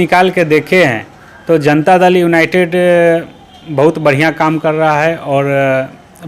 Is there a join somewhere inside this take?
no; 0 cuts

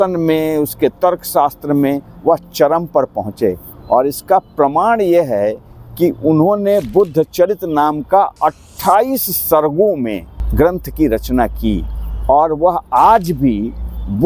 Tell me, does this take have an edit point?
no; 0 cuts

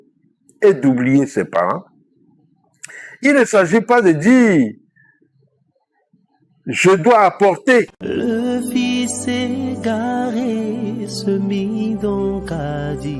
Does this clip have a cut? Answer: yes; 1 cut; at 8.0 s

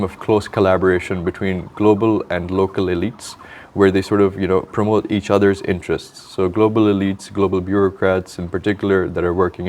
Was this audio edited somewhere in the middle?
no; 0 cuts

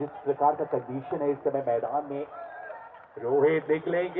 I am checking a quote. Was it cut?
no; 0 cuts

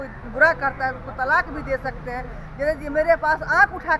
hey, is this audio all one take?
yes; 0 cuts

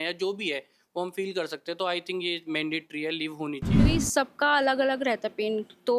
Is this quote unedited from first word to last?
no; 1 cut; at 3.8 s

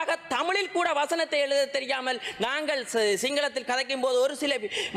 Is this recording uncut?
yes; 0 cuts

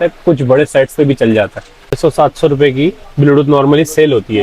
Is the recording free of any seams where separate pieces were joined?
no; 1 cut; at 2.0 s

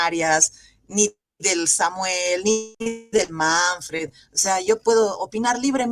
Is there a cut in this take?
yes; 1 cut; at 2.7 s

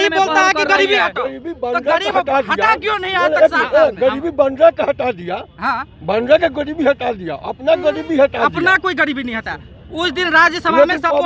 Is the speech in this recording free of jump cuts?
yes; 0 cuts

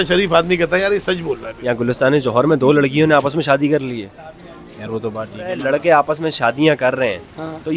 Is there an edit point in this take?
yes; 2 cuts; at 1.5 s, 5.6 s

